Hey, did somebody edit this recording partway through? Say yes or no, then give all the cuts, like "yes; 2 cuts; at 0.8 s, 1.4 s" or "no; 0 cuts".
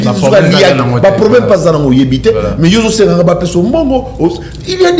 no; 0 cuts